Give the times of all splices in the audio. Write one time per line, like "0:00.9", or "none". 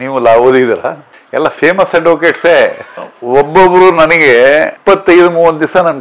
0:01.0

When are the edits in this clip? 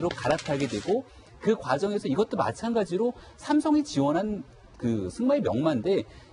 0:04.4

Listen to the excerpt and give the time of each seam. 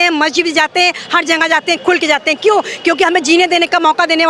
none

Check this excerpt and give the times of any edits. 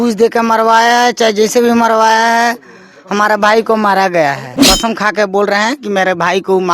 0:04.5

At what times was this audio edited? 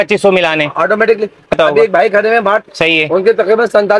0:01.6
0:02.7

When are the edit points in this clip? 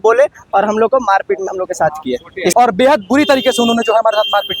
0:02.5

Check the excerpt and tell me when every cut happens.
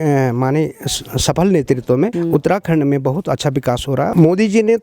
0:02.1
0:04.1

